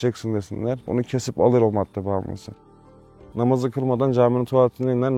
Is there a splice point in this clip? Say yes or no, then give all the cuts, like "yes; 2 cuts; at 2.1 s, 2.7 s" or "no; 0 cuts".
yes; 2 cuts; at 0.8 s, 2.9 s